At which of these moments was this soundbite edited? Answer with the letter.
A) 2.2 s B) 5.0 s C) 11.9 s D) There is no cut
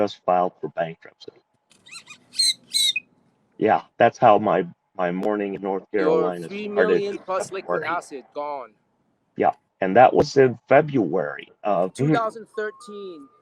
C